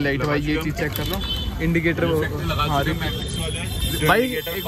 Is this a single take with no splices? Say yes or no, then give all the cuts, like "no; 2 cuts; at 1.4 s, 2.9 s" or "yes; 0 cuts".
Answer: yes; 0 cuts